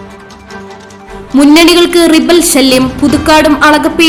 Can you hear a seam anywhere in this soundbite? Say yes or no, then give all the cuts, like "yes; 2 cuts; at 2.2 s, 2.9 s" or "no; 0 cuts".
no; 0 cuts